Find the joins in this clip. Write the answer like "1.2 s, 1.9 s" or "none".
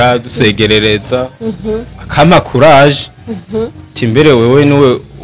none